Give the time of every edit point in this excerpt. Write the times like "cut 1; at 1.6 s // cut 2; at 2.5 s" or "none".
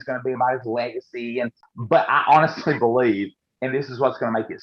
cut 1; at 1.6 s